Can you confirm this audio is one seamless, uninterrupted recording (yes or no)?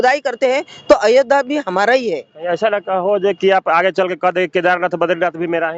yes